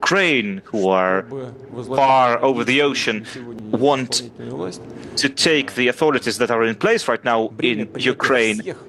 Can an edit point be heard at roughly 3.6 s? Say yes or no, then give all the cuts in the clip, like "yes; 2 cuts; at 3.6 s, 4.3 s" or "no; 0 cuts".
yes; 1 cut; at 3.6 s